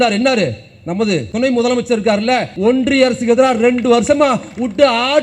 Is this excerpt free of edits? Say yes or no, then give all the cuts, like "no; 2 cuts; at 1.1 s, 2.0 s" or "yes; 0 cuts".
no; 2 cuts; at 1.3 s, 2.5 s